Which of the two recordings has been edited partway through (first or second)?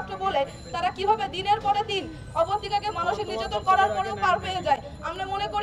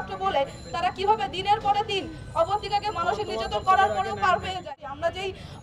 second